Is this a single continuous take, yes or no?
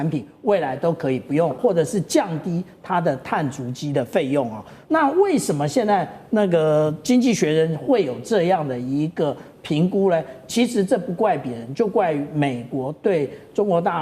no